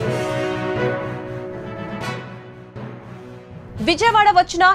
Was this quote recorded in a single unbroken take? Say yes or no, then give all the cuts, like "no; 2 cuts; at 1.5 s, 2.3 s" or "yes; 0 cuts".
no; 1 cut; at 3.6 s